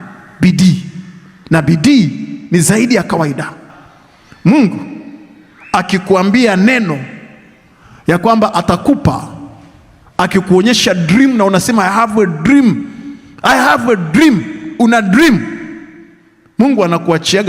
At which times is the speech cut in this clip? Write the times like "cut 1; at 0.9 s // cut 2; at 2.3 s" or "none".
cut 1; at 3.6 s